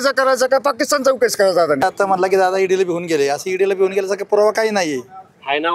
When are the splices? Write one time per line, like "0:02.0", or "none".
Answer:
0:01.8